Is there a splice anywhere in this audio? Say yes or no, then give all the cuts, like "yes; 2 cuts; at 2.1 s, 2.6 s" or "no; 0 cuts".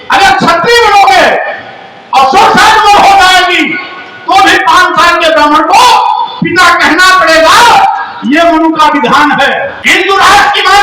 yes; 1 cut; at 9.8 s